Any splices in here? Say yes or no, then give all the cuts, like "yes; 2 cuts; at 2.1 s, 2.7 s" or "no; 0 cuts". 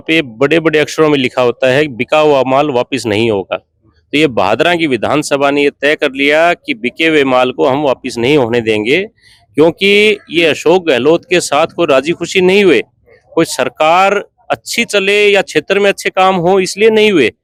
no; 0 cuts